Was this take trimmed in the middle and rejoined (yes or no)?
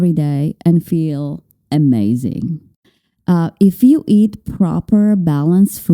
yes